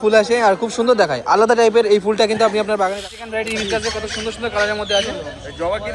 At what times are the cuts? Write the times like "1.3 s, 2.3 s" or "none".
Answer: 3.0 s